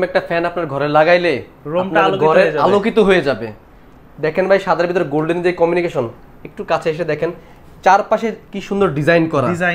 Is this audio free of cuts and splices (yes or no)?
yes